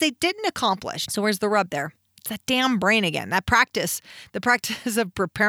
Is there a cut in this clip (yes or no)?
yes